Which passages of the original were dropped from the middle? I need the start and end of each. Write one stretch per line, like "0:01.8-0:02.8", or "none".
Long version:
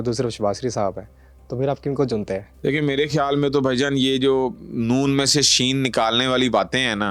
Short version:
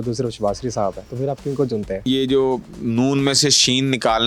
0:01.1-0:01.5
0:02.5-0:04.0